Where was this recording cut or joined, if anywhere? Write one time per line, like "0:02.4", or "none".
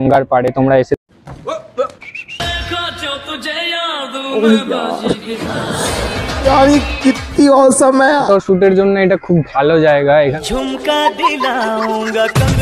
0:08.2
0:10.3